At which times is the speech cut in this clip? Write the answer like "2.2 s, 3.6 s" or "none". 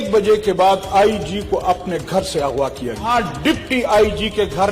3.1 s